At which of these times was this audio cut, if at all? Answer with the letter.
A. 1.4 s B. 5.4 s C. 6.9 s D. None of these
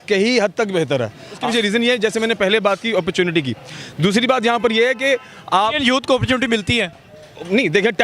A